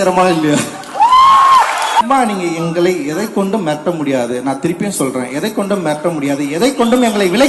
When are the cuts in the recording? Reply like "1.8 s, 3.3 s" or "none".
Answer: 2.0 s